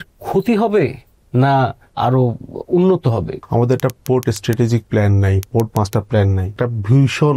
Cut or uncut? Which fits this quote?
cut